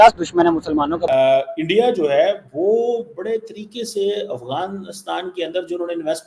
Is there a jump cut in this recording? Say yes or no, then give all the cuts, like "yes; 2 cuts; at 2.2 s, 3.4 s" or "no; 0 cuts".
yes; 1 cut; at 1.0 s